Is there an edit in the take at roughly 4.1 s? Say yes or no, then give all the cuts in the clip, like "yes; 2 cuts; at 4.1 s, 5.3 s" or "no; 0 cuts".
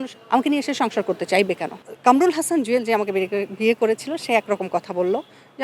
no; 1 cut; at 1.8 s